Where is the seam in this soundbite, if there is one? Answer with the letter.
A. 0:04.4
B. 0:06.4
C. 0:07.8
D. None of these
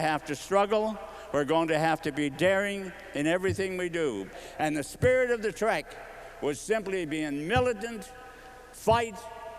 A